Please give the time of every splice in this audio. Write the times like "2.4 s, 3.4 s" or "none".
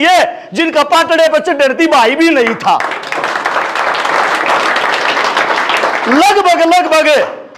none